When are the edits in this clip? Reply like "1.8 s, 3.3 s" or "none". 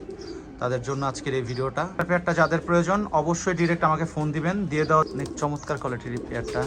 1.9 s, 5.1 s